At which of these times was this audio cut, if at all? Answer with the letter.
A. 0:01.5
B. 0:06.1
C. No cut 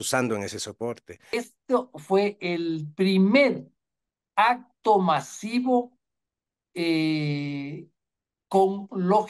A